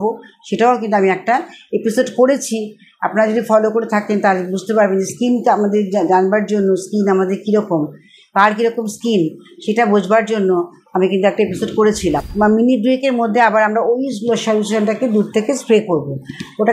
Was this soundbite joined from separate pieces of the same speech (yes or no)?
yes